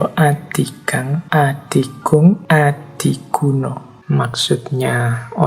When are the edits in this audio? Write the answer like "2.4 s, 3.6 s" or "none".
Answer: 1.2 s, 2.4 s, 3.9 s